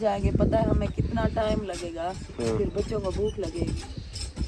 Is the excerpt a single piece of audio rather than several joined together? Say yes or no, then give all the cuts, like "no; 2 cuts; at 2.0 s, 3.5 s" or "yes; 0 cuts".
yes; 0 cuts